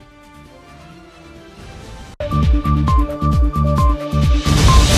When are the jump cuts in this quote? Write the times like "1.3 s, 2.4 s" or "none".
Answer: none